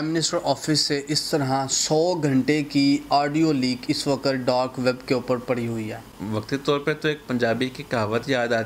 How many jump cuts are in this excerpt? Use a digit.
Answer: 1